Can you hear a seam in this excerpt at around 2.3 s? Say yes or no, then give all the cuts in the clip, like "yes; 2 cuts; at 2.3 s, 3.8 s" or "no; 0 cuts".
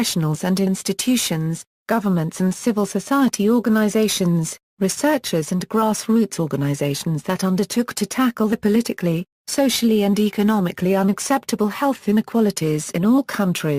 yes; 1 cut; at 2.3 s